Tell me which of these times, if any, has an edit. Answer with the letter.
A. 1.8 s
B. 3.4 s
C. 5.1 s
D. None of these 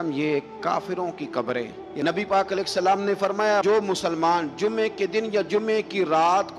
A